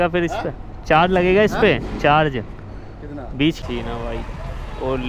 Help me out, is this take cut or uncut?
cut